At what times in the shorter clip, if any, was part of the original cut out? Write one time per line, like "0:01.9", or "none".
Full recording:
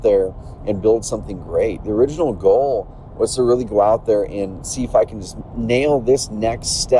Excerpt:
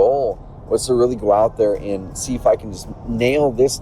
none